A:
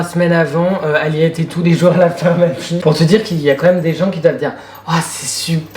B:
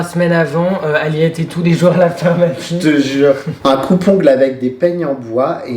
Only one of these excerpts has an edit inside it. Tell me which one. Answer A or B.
A